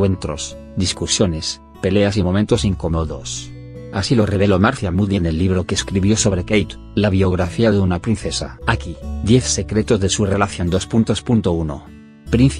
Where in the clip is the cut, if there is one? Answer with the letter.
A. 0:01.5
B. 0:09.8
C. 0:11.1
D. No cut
A